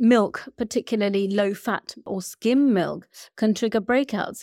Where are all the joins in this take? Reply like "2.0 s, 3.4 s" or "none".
2.1 s